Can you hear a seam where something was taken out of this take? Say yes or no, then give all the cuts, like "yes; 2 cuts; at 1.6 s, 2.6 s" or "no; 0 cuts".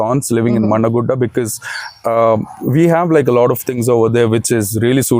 no; 0 cuts